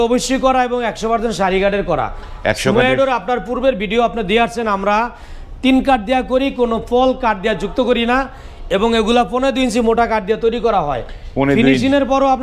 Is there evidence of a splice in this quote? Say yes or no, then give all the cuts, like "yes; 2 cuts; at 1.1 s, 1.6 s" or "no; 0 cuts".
no; 0 cuts